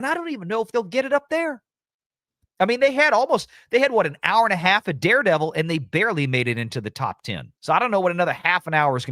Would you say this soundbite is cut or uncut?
uncut